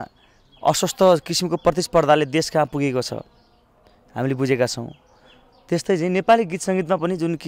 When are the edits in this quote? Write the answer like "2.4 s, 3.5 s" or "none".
none